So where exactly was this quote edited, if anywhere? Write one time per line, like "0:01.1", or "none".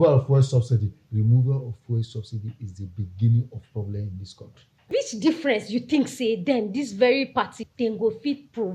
0:01.0
0:04.9
0:07.6